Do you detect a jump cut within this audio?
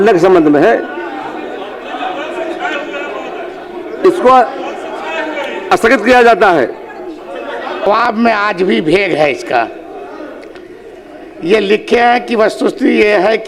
no; 0 cuts

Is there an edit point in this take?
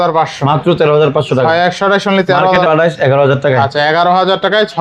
yes; 1 cut; at 2.5 s

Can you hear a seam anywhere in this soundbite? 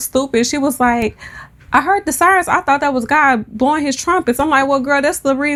no; 0 cuts

